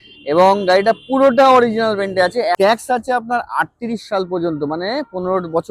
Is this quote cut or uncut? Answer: cut